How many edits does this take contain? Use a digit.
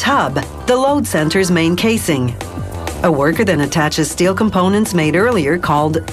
1